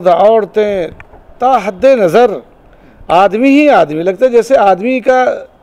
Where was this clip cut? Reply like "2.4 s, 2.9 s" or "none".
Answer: none